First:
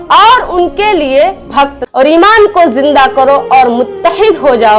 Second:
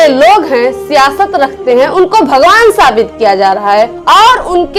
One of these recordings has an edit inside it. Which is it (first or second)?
first